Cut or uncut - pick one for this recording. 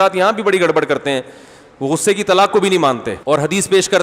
cut